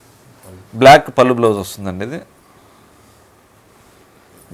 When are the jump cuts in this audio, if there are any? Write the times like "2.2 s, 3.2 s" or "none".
none